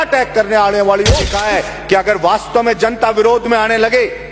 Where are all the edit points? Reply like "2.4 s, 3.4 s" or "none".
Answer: 1.4 s